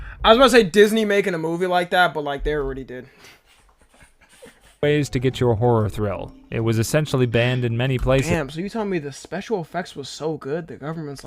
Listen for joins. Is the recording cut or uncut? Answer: cut